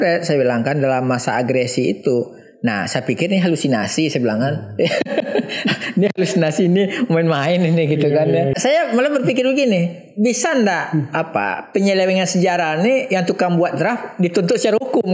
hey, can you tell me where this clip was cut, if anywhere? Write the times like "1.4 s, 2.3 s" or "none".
8.6 s